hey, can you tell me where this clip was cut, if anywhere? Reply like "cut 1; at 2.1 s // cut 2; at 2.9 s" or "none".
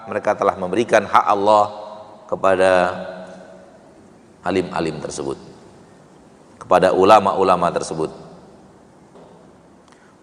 cut 1; at 9.1 s